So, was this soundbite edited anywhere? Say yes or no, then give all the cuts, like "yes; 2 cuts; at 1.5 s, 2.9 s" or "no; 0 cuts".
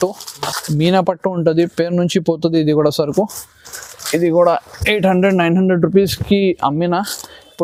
no; 0 cuts